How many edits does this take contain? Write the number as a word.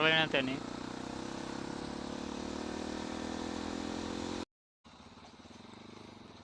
one